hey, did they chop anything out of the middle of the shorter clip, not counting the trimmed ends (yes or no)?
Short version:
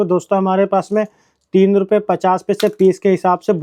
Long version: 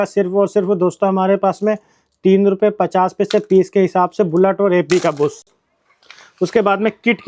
no